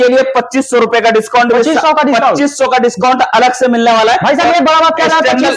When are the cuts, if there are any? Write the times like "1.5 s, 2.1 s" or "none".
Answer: none